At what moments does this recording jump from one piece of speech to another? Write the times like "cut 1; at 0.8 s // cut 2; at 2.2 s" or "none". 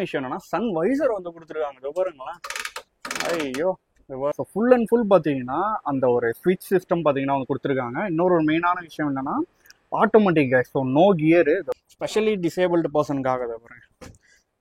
cut 1; at 4.4 s // cut 2; at 11.7 s